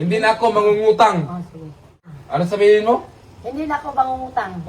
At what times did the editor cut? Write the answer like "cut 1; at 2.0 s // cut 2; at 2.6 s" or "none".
cut 1; at 1.8 s